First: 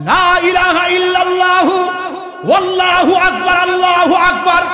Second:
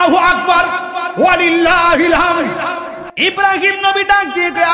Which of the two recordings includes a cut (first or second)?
second